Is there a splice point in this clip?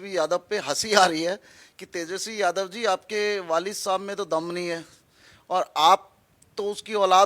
no; 0 cuts

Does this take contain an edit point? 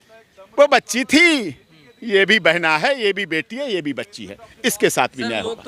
no; 0 cuts

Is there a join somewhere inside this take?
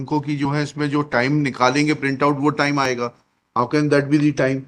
no; 0 cuts

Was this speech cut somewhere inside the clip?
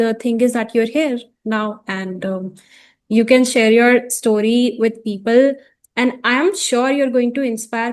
no; 0 cuts

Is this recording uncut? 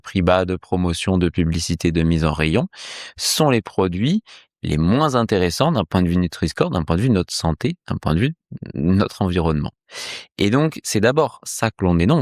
yes; 0 cuts

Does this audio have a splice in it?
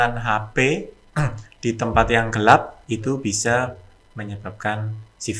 no; 0 cuts

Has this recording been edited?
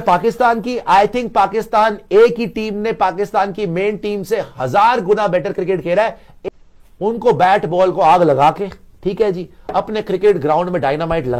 yes; 1 cut; at 6.3 s

